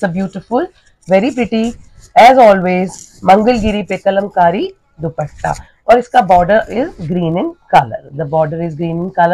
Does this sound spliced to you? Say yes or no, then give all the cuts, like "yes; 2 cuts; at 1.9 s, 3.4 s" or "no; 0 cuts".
no; 0 cuts